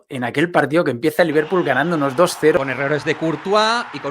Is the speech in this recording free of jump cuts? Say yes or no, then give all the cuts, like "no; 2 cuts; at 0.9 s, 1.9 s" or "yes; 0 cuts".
no; 1 cut; at 2.6 s